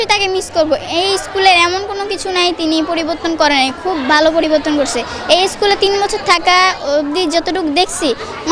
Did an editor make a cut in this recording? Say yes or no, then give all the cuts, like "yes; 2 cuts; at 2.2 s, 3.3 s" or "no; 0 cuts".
no; 0 cuts